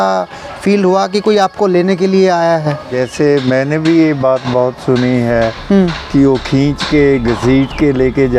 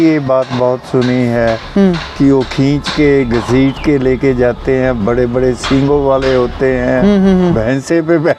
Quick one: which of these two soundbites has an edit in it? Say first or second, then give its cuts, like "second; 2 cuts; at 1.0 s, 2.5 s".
first; 1 cut; at 2.9 s